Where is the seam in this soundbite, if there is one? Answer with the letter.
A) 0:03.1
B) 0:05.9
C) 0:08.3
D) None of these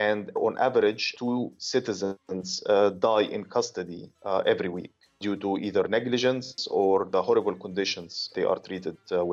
C